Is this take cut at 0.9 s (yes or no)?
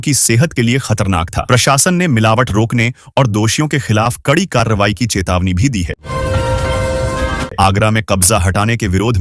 no